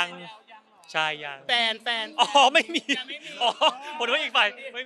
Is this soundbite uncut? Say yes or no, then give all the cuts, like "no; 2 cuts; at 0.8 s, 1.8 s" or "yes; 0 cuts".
no; 1 cut; at 1.4 s